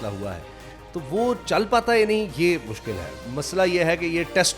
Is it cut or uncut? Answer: cut